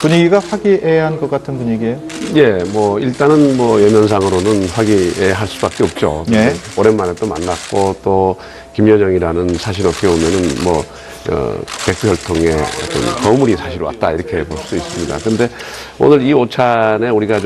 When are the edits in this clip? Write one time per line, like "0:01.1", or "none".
0:04.5